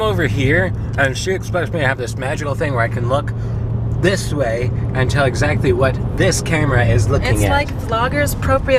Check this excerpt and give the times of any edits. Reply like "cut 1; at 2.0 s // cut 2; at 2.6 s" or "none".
none